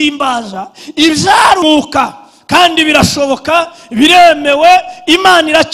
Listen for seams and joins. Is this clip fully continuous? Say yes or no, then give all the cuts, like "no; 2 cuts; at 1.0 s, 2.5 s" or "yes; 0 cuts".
no; 1 cut; at 1.6 s